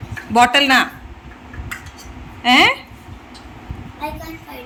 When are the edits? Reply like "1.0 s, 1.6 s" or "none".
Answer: none